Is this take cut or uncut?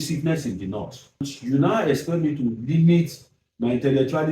cut